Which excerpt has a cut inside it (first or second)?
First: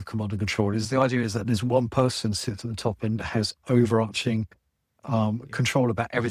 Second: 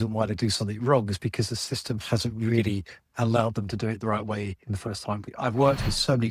second